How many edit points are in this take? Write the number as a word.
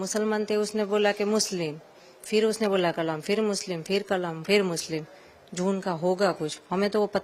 zero